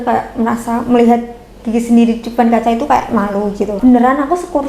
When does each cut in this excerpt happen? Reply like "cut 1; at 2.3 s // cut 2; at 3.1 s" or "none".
cut 1; at 3.8 s

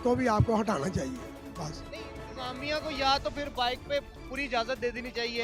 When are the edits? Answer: none

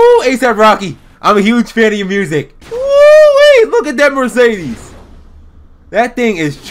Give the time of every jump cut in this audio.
cut 1; at 2.6 s

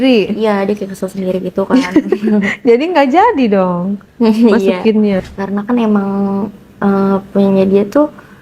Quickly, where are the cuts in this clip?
cut 1; at 5.3 s

